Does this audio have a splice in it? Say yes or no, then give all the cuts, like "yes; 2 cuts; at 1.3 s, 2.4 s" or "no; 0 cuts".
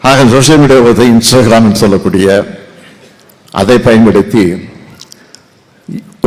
no; 0 cuts